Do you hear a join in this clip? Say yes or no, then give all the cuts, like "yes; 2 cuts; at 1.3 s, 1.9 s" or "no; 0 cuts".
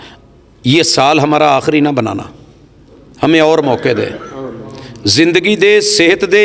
no; 0 cuts